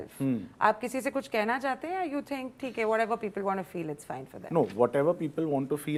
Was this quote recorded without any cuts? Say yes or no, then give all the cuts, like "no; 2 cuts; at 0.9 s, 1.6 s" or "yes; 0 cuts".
yes; 0 cuts